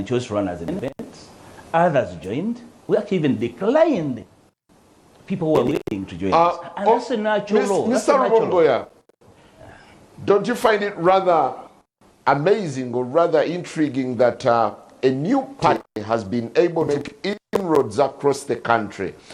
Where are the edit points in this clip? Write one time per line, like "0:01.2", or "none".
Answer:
0:09.6